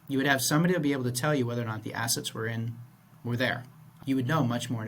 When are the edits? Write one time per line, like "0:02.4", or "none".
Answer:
0:04.0